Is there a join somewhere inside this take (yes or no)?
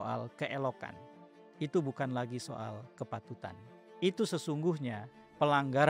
no